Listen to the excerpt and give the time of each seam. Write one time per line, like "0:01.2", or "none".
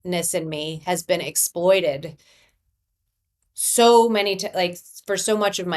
none